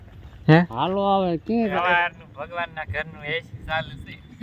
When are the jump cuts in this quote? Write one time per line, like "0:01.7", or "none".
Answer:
0:01.7